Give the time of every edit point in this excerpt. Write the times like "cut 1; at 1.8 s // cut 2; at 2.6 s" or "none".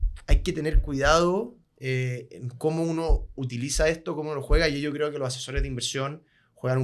none